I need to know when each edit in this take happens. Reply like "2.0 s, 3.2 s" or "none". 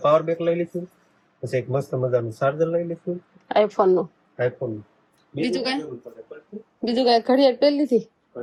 none